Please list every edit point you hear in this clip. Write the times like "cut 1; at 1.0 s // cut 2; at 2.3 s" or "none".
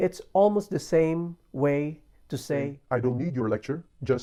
none